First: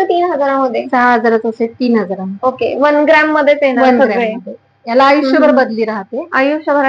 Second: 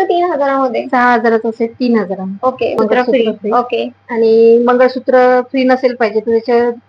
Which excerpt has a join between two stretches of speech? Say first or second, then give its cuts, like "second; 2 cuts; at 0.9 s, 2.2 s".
second; 1 cut; at 2.8 s